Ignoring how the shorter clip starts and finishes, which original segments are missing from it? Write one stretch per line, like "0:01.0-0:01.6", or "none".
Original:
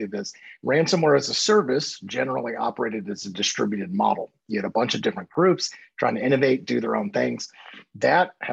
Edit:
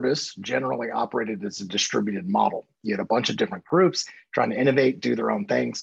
none